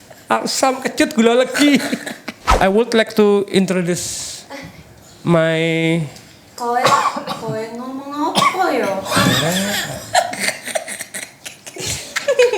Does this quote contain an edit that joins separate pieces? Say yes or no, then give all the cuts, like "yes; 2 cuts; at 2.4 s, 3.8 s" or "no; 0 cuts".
yes; 1 cut; at 2.5 s